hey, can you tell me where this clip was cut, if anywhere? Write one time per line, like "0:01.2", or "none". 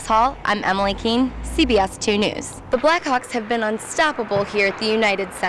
none